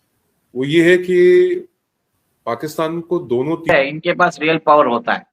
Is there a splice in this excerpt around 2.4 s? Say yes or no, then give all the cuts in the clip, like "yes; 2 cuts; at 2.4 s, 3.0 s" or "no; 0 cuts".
no; 1 cut; at 3.7 s